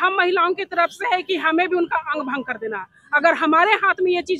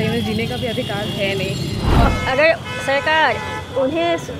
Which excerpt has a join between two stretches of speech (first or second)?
second